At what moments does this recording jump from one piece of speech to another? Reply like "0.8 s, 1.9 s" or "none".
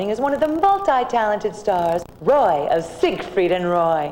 2.1 s